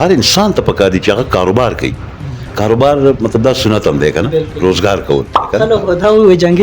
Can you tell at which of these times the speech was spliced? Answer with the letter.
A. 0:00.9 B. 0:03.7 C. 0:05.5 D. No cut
C